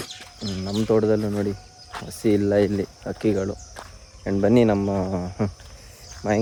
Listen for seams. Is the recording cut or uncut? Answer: uncut